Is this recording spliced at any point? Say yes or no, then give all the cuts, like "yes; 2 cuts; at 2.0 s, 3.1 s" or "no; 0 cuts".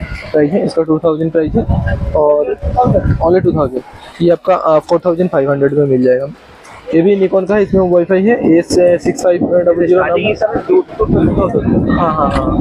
no; 0 cuts